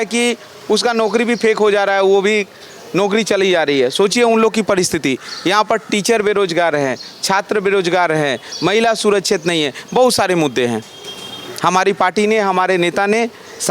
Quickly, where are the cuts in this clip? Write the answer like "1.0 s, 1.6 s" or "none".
none